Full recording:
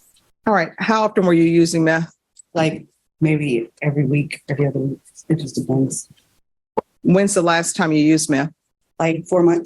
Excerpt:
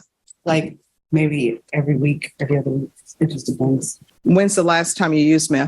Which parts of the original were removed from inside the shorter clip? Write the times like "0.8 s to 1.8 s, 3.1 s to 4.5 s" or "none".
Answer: 6.2 s to 6.9 s

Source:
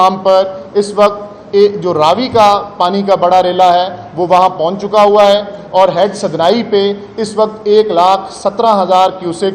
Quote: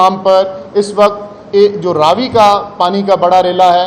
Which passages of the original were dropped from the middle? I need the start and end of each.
none

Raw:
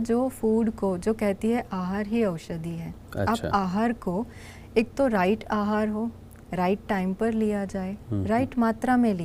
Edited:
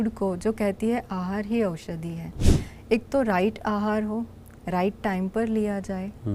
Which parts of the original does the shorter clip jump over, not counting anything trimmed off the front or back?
3.1 s to 4.3 s

